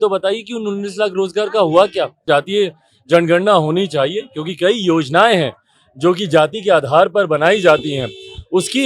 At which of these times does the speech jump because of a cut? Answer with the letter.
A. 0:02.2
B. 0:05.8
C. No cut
A